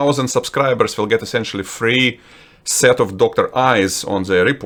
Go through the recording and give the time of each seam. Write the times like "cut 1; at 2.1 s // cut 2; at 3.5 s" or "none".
none